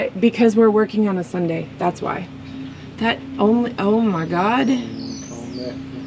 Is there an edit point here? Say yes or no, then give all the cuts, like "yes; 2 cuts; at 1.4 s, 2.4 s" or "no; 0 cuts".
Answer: no; 0 cuts